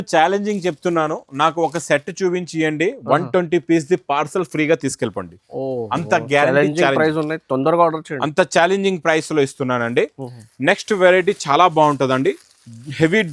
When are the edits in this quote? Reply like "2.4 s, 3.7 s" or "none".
none